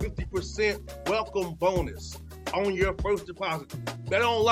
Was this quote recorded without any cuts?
yes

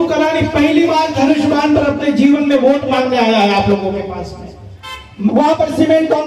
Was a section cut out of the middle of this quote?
yes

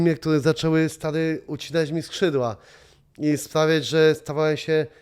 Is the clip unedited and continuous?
yes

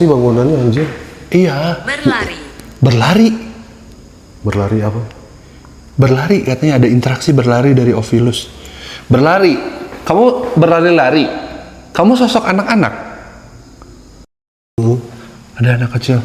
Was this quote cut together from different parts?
yes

